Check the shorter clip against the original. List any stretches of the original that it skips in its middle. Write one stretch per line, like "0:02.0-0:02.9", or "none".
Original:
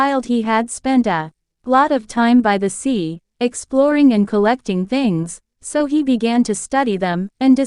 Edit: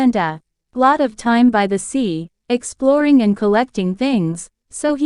none